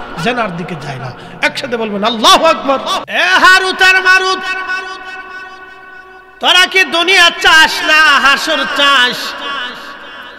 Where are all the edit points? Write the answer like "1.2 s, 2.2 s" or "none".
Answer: 3.0 s